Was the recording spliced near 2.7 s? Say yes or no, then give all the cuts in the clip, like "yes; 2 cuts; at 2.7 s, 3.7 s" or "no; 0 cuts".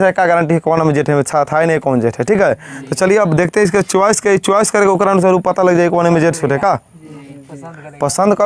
no; 0 cuts